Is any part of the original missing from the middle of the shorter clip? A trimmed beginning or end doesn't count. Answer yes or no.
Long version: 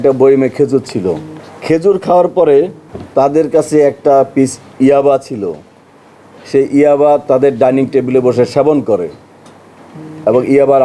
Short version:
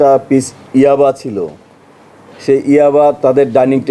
no